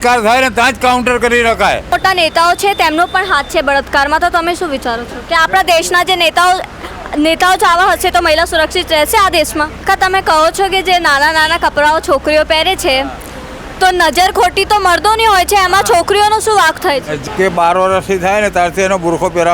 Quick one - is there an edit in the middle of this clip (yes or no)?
yes